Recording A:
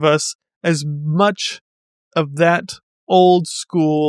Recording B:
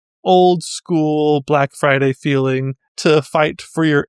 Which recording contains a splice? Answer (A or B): B